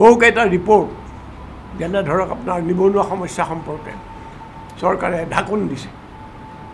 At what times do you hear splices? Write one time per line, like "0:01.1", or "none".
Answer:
none